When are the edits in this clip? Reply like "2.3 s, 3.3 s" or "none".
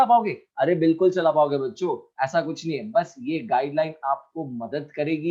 none